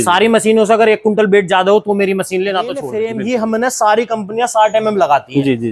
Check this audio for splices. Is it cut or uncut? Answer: cut